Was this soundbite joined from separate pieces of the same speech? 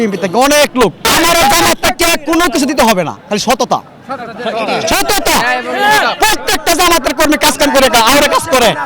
yes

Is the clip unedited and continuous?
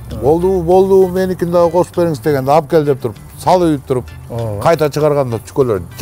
yes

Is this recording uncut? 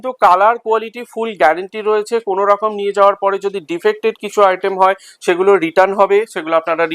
yes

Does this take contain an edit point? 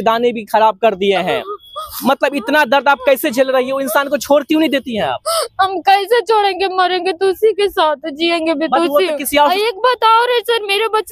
yes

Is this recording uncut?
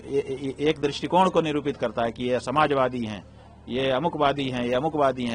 yes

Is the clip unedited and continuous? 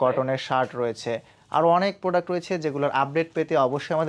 yes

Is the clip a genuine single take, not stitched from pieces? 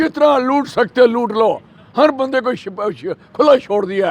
yes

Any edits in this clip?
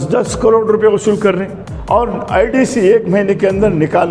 yes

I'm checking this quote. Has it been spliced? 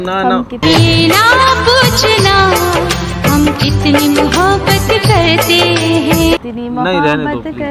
no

